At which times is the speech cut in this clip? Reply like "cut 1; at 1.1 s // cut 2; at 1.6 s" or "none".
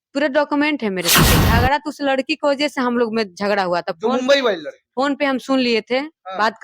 cut 1; at 1.4 s